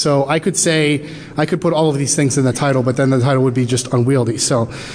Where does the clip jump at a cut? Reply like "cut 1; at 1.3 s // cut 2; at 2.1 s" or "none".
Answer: none